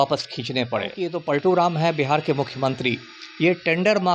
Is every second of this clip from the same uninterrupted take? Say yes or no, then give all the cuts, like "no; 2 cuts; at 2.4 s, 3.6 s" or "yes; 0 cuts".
no; 1 cut; at 1.1 s